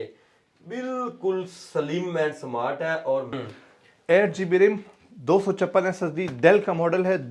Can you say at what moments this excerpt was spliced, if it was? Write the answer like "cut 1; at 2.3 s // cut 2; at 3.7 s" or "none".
cut 1; at 3.4 s